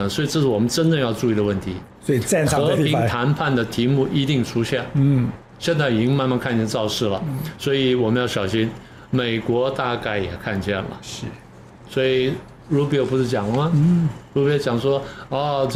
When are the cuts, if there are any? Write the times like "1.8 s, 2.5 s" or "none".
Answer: none

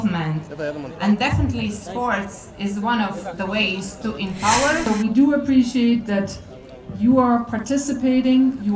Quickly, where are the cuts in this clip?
4.9 s

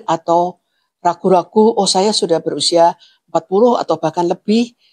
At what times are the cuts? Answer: none

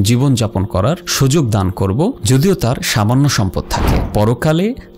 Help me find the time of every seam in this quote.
3.9 s

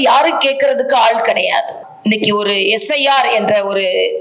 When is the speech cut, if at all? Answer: 1.9 s

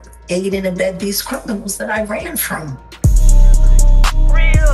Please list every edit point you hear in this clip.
2.9 s

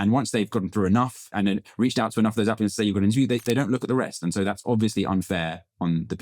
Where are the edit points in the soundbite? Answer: 1.3 s

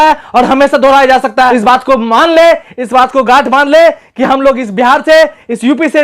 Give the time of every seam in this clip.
1.5 s

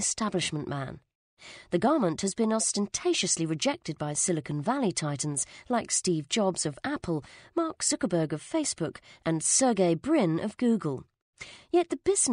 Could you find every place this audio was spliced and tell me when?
1.9 s

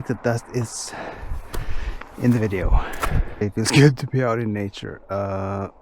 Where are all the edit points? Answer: 3.4 s

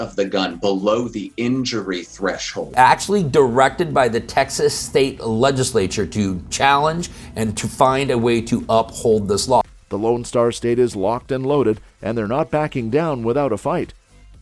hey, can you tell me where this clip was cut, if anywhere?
none

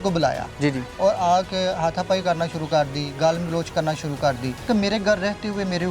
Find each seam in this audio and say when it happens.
4.6 s

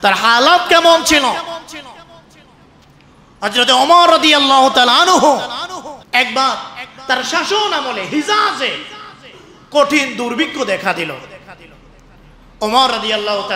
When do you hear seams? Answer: 6.0 s

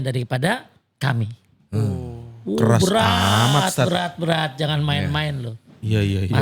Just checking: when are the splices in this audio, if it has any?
none

